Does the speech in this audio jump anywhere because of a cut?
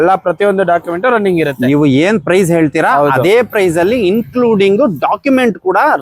no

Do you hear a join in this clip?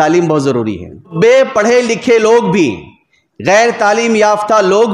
yes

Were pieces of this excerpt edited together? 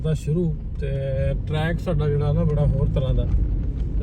no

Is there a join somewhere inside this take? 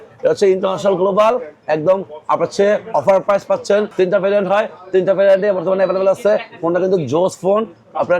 yes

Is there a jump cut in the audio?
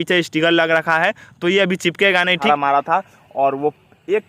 yes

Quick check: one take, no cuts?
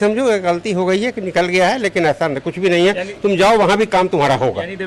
yes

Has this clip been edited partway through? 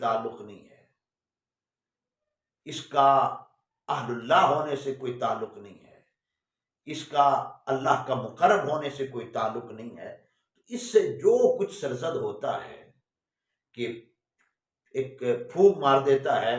no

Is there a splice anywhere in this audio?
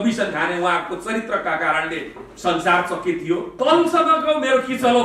yes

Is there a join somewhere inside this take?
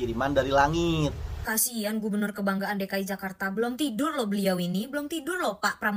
yes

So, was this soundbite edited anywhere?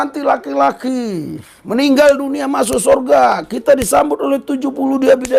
no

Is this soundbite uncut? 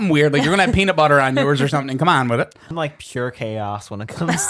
no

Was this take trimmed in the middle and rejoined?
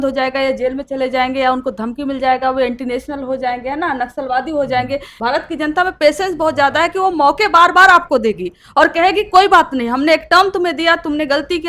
yes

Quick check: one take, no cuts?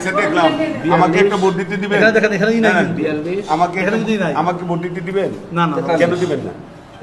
yes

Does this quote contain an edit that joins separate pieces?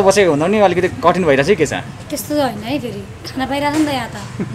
no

